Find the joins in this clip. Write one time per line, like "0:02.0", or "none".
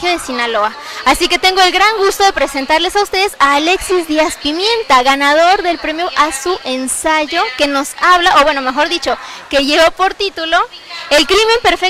none